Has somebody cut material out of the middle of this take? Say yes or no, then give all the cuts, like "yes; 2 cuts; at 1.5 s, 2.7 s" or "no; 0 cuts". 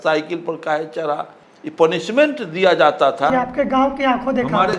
no; 0 cuts